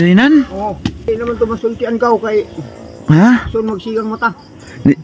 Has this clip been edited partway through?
yes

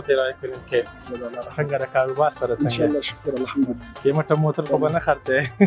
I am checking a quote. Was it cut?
yes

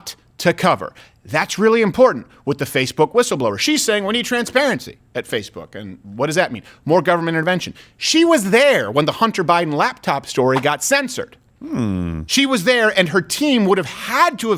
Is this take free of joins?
yes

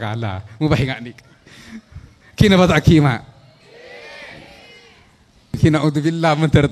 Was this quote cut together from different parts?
yes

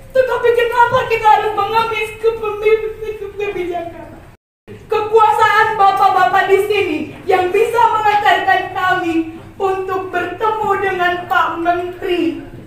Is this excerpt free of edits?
no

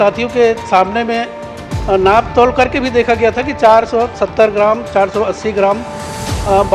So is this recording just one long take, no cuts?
yes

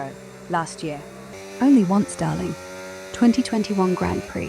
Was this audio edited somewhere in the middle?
yes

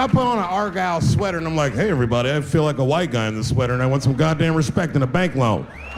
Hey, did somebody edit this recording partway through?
no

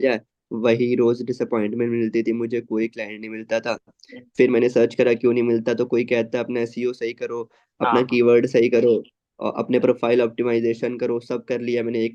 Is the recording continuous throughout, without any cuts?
yes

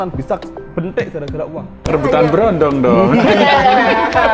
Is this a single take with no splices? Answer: no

